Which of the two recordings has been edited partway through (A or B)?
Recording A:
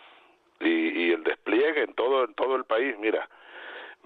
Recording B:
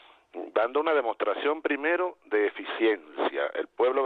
A